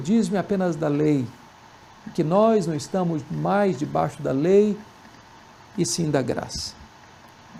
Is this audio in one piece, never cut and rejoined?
yes; 0 cuts

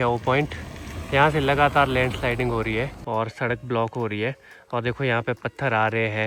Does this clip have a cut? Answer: no; 0 cuts

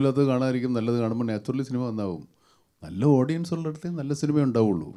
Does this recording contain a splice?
no; 0 cuts

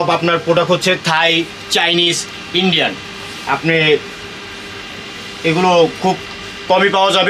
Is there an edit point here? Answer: no; 0 cuts

